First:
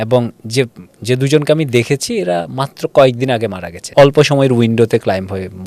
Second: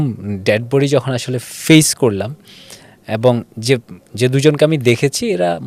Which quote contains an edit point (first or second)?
first